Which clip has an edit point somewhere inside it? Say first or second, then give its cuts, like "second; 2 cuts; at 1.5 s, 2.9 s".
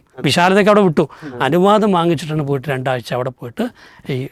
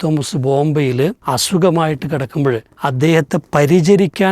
second; 2 cuts; at 1.2 s, 2.7 s